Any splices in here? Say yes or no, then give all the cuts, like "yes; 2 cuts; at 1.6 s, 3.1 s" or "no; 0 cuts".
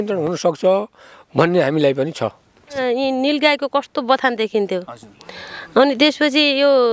yes; 1 cut; at 2.8 s